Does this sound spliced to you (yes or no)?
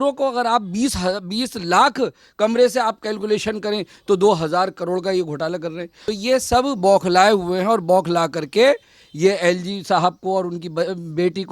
yes